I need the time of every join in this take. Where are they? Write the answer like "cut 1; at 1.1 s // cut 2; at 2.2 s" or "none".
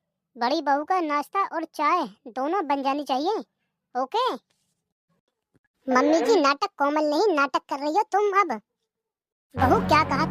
cut 1; at 5.2 s